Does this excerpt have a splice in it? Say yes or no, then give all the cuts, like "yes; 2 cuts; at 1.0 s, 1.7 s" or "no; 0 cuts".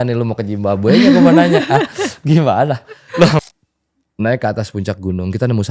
yes; 1 cut; at 3.4 s